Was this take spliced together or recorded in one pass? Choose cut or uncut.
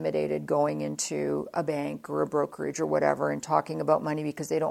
uncut